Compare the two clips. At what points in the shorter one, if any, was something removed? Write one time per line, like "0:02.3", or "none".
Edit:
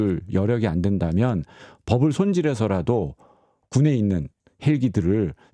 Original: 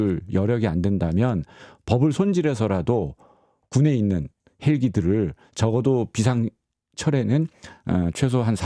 none